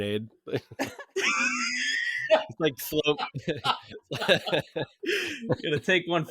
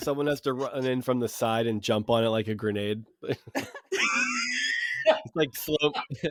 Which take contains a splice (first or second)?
first